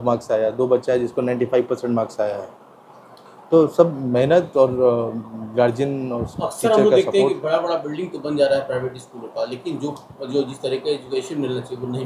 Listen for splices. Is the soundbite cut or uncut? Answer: uncut